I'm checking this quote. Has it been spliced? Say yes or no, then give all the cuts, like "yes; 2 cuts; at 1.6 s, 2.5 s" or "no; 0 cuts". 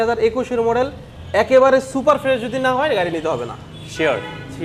no; 0 cuts